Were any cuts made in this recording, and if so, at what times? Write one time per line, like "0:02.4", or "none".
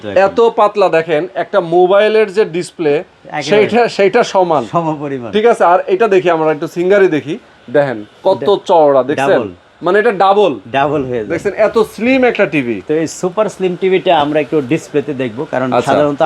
none